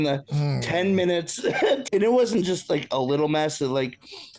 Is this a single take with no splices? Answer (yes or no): no